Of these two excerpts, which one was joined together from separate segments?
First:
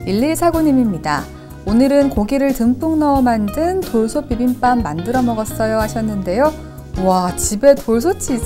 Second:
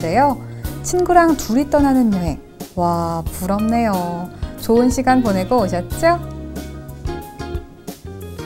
second; 1 cut; at 6.2 s

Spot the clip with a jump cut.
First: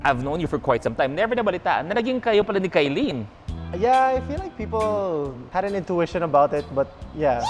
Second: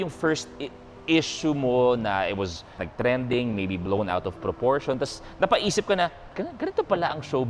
second; 2 cuts; at 2.9 s, 6.4 s

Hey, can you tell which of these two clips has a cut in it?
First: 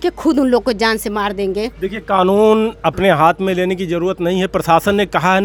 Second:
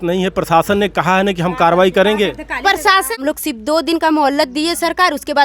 second; 1 cut; at 3.2 s

